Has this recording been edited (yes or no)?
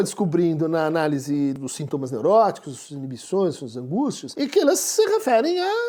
yes